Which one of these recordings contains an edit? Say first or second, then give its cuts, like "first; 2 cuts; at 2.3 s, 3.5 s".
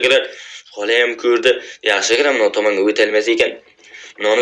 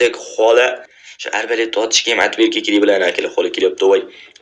second; 1 cut; at 0.9 s